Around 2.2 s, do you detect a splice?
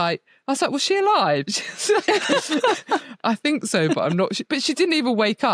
no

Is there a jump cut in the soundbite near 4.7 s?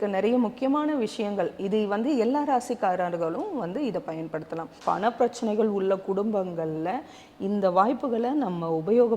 yes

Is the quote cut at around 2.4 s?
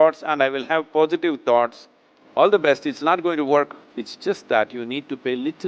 no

